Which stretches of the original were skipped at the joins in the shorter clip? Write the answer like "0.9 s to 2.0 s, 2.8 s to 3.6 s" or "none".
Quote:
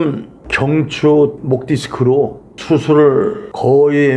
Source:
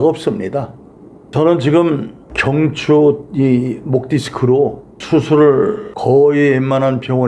3.2 s to 3.8 s